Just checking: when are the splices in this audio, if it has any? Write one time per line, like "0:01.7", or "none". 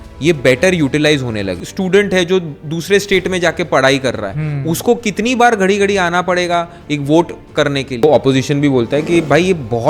0:01.6
0:08.0